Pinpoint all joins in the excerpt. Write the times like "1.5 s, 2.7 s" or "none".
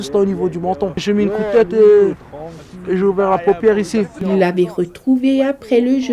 1.0 s, 4.3 s